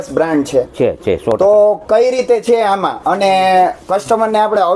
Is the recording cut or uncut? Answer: uncut